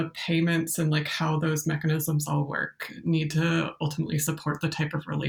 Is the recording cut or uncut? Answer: uncut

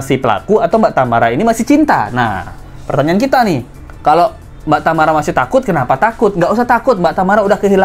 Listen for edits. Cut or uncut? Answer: uncut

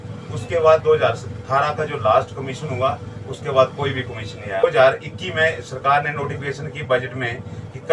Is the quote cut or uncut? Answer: cut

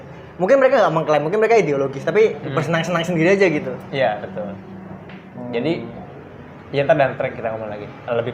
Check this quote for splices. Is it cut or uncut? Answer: uncut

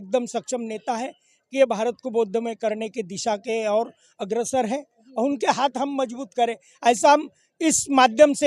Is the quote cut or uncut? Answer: uncut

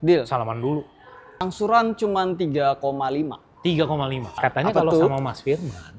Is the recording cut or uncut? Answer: cut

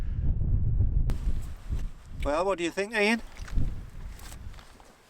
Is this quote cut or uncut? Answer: cut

